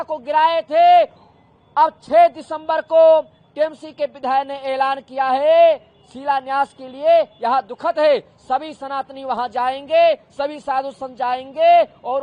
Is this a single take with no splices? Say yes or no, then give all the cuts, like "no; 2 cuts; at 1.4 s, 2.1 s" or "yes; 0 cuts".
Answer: yes; 0 cuts